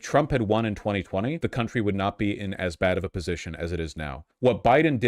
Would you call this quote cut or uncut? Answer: cut